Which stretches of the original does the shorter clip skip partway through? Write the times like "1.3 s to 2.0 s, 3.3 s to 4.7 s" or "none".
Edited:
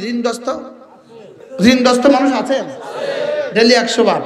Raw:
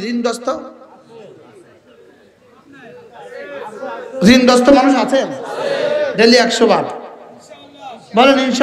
1.4 s to 4.0 s